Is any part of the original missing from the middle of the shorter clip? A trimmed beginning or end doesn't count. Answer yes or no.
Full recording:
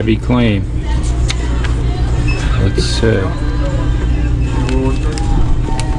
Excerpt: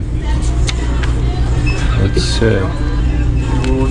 yes